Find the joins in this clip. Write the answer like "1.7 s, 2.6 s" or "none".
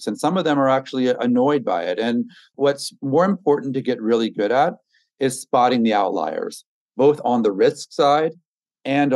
2.5 s